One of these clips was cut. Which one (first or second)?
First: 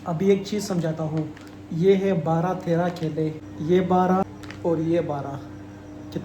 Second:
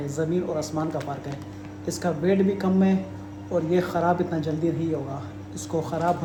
first